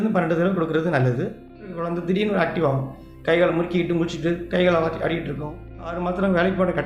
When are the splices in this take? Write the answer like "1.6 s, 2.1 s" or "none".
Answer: 1.8 s, 6.0 s